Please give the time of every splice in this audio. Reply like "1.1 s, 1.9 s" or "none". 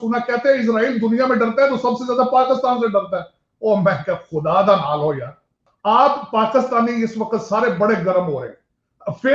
5.7 s